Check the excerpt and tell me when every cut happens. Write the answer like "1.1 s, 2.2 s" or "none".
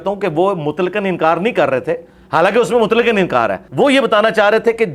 3.6 s